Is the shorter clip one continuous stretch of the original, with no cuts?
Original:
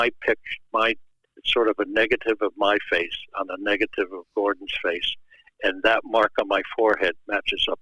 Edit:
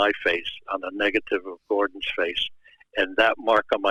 yes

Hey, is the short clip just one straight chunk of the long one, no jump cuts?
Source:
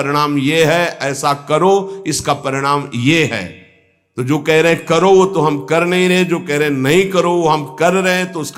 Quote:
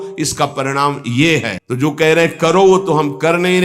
no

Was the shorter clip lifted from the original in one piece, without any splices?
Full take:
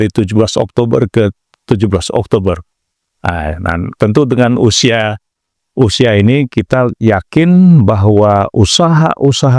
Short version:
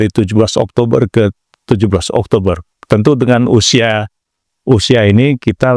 no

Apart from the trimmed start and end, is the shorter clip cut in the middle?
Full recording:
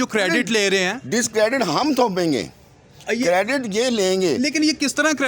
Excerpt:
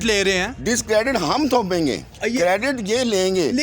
yes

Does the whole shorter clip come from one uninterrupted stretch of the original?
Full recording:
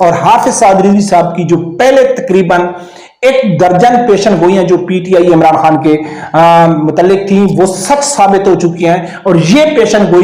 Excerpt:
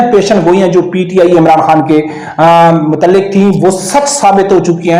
yes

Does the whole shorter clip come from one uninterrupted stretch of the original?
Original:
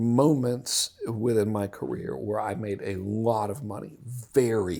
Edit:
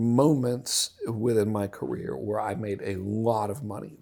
yes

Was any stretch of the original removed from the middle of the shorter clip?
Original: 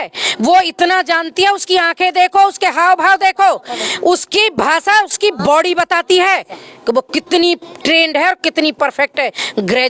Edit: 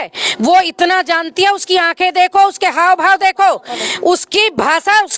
no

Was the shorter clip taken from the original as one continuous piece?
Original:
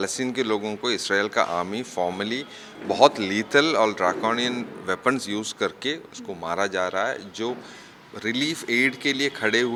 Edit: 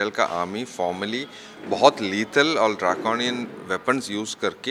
yes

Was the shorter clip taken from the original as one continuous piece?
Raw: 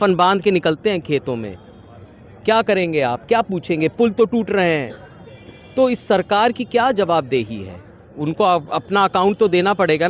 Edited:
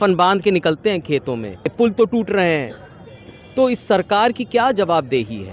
no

